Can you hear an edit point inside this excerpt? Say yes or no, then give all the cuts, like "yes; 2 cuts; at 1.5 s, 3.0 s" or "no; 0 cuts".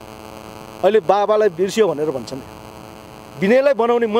no; 0 cuts